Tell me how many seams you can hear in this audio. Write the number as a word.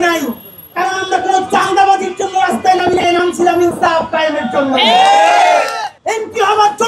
one